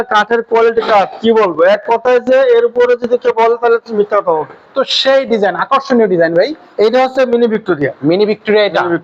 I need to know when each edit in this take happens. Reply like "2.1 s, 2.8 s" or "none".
4.6 s